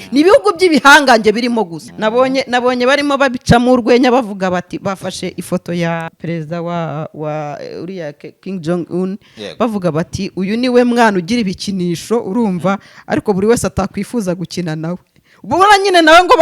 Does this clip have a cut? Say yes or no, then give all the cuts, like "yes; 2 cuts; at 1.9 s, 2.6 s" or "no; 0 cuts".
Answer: yes; 2 cuts; at 1.8 s, 6.1 s